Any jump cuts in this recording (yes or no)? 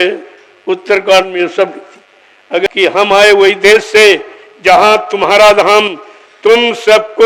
yes